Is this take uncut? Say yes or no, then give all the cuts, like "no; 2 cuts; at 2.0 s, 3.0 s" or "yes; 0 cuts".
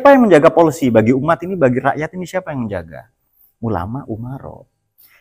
yes; 0 cuts